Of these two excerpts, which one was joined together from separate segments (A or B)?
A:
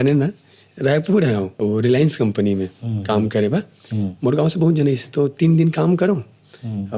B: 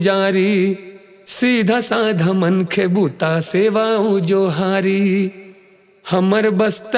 A